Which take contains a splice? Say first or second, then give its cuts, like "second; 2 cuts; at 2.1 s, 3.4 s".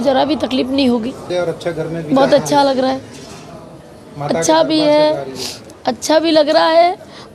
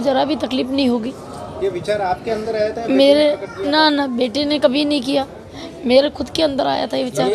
first; 1 cut; at 1.2 s